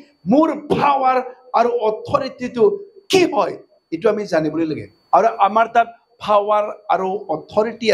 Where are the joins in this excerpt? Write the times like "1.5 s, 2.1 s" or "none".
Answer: 4.9 s